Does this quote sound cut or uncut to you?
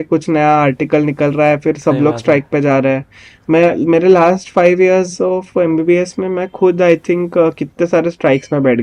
uncut